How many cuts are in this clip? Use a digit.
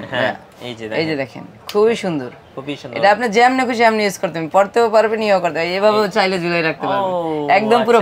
0